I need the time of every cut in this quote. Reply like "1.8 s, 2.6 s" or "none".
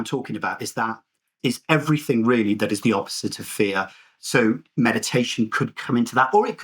1.4 s